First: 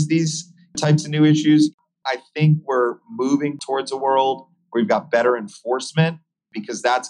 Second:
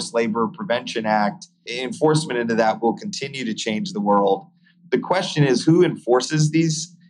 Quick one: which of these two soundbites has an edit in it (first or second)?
first